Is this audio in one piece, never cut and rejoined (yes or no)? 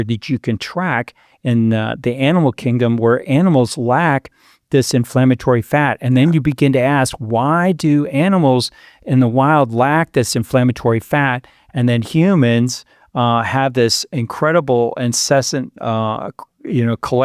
yes